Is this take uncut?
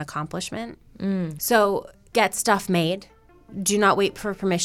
no; 2 cuts; at 1.3 s, 2.0 s

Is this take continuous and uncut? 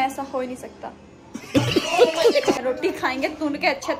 no; 1 cut; at 2.6 s

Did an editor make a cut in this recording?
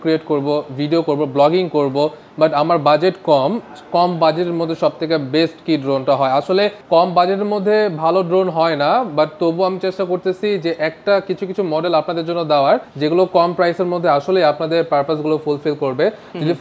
no; 0 cuts

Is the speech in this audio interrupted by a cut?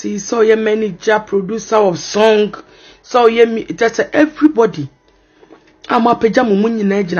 no; 0 cuts

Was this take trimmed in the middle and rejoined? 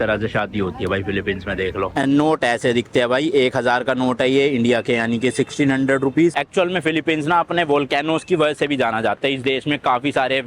yes; 2 cuts; at 1.9 s, 6.3 s

